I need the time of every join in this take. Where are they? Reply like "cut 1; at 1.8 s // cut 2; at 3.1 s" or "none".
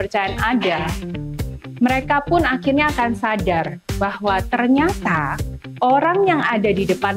none